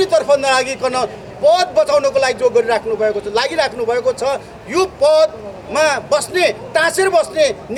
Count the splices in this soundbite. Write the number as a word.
zero